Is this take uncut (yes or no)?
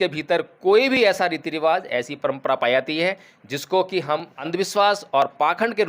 no